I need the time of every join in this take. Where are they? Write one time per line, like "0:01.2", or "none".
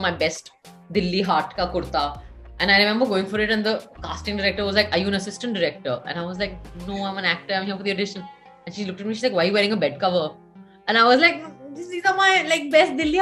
none